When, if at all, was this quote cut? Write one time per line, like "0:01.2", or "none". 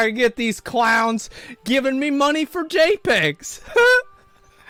none

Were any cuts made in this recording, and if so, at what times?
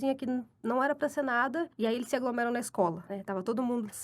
0:01.7
0:03.1

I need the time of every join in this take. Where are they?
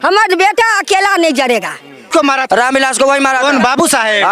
0:02.1

